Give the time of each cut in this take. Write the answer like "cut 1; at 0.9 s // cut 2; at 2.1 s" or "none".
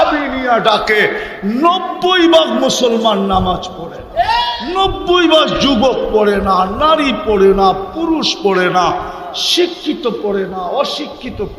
cut 1; at 4.6 s